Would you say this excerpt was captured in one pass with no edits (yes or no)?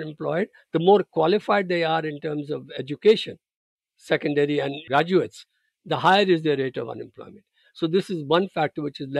no